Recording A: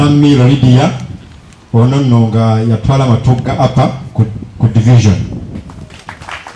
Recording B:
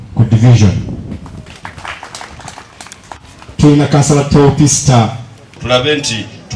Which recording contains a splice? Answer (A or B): B